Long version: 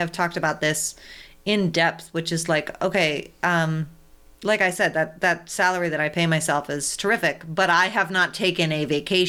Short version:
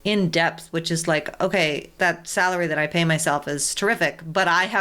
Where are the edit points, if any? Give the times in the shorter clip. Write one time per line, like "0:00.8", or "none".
0:01.9